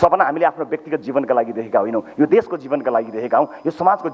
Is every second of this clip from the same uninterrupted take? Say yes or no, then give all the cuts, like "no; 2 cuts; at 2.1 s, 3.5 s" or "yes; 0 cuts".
yes; 0 cuts